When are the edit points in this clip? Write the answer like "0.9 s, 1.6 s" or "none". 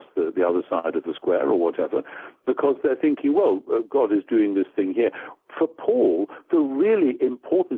none

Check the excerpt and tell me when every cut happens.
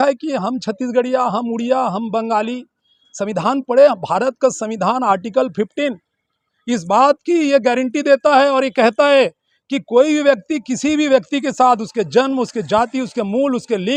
none

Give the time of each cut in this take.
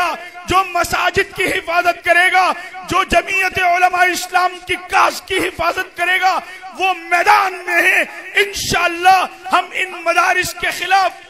none

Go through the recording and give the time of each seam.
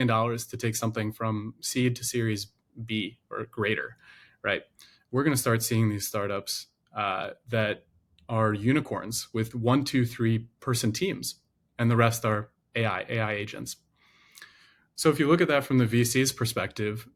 none

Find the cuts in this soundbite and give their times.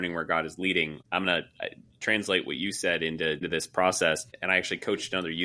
1.0 s, 3.5 s, 4.3 s

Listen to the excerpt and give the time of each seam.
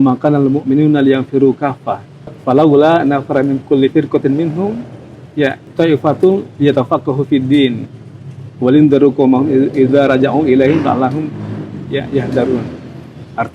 2.4 s, 5.6 s

